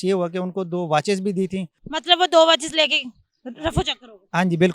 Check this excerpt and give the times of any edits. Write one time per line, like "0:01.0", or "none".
0:01.8